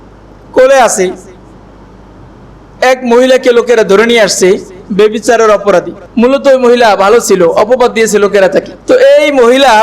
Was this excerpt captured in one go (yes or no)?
no